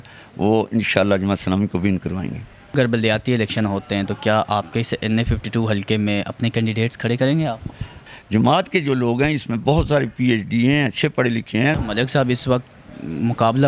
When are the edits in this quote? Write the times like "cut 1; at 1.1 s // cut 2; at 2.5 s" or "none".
cut 1; at 2.8 s // cut 2; at 8.0 s // cut 3; at 11.8 s